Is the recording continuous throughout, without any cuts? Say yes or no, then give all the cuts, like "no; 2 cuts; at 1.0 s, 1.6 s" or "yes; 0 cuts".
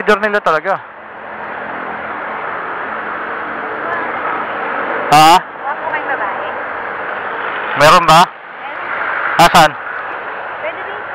yes; 0 cuts